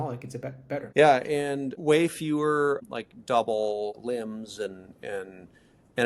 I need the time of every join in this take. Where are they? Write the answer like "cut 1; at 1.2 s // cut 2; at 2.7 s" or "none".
cut 1; at 0.9 s // cut 2; at 1.7 s // cut 3; at 2.8 s // cut 4; at 4.0 s